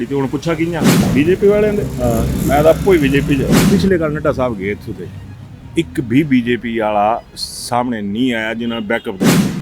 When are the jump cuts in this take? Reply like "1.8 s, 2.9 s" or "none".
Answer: 1.0 s, 3.7 s